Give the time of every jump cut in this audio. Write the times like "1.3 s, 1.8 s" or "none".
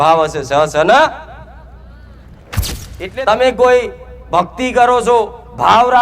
2.6 s